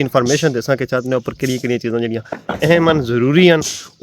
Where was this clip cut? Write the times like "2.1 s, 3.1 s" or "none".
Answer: none